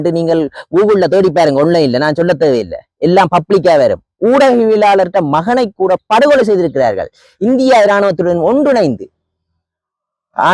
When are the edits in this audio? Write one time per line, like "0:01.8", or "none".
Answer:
none